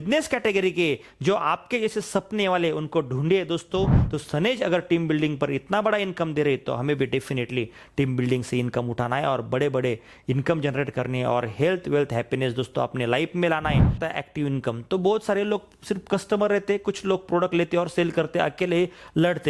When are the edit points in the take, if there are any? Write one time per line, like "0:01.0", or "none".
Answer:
0:04.0
0:14.0